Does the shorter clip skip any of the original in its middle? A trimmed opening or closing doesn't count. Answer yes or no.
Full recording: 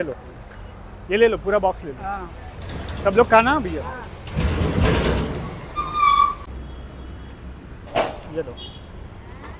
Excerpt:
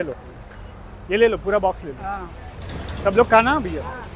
no